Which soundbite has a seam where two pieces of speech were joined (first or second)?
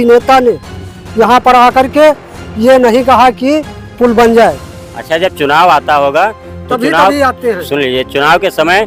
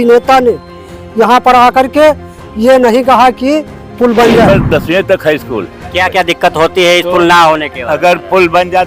second